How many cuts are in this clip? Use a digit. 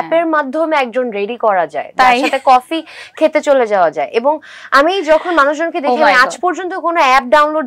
0